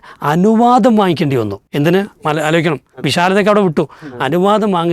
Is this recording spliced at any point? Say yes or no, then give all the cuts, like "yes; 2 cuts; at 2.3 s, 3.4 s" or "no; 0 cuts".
yes; 1 cut; at 1.6 s